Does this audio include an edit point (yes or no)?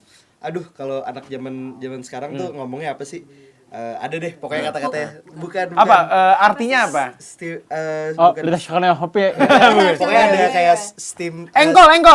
no